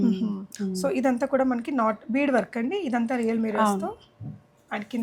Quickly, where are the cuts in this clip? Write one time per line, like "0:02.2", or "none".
none